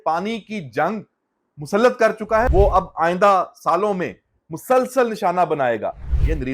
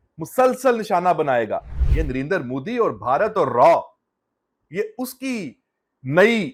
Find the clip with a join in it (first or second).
first